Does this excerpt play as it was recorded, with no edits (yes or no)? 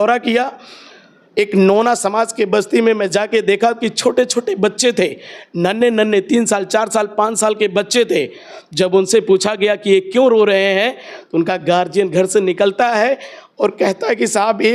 yes